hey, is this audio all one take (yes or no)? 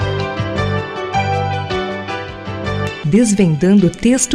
yes